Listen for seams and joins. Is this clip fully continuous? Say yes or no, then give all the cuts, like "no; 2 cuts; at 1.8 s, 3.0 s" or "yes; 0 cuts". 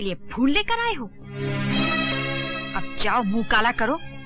yes; 0 cuts